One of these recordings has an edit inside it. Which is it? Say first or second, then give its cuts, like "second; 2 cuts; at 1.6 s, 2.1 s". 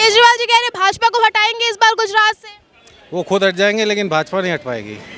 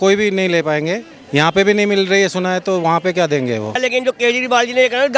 second; 1 cut; at 3.7 s